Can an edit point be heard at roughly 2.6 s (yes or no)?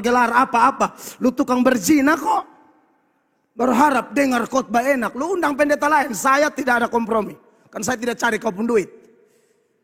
no